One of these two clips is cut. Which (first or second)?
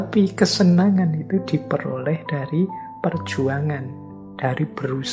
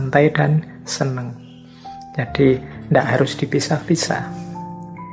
second